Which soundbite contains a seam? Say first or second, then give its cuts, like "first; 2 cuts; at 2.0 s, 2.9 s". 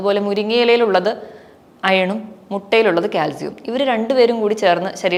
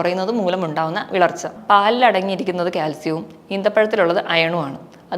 second; 1 cut; at 1.5 s